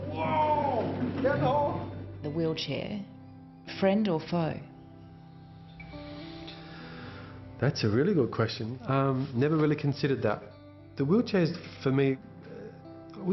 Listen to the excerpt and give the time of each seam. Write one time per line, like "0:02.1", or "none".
0:06.0